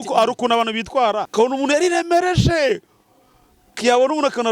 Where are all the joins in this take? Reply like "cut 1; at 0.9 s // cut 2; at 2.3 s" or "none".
cut 1; at 1.3 s